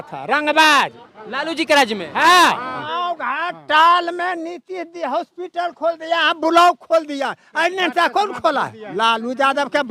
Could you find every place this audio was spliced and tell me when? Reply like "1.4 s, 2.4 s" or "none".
2.7 s